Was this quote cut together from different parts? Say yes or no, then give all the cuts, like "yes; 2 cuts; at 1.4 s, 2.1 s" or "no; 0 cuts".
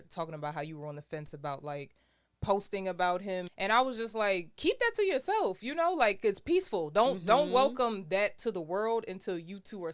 yes; 1 cut; at 3.5 s